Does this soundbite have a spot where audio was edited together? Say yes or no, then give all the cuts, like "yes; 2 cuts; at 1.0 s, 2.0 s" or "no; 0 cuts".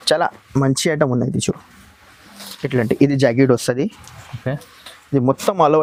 no; 0 cuts